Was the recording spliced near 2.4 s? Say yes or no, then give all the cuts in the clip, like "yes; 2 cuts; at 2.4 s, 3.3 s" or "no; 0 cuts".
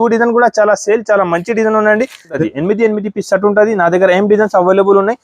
yes; 1 cut; at 2.4 s